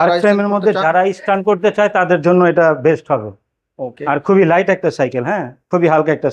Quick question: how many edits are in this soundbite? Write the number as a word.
zero